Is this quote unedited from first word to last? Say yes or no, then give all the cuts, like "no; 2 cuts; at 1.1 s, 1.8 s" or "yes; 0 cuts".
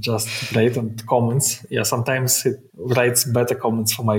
no; 1 cut; at 2.7 s